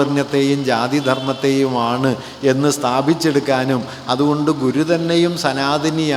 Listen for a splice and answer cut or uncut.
uncut